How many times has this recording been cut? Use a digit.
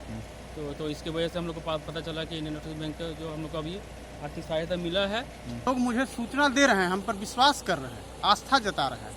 1